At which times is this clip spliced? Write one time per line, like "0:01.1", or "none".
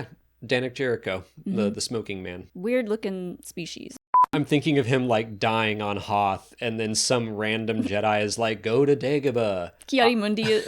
0:02.4
0:04.3